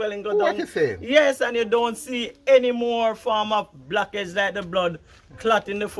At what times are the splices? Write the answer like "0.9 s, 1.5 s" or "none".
none